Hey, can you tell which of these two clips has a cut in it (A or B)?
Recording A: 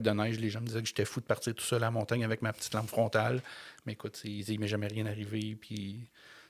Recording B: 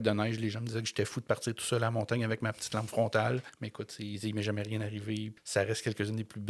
B